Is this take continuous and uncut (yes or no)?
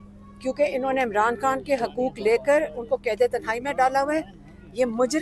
yes